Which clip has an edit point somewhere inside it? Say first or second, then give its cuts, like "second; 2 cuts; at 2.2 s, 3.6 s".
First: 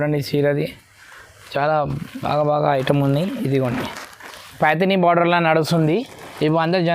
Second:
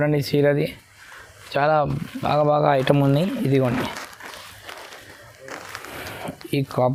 first; 1 cut; at 4.6 s